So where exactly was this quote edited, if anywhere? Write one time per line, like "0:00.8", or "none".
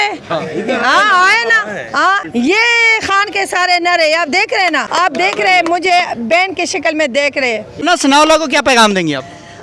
0:02.2
0:04.8
0:07.8